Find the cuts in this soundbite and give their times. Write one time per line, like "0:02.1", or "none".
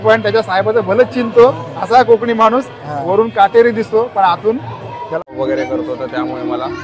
0:05.3